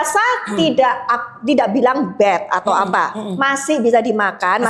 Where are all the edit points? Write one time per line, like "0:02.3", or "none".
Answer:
none